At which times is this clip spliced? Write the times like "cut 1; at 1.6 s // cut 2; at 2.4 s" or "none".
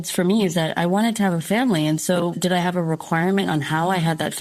none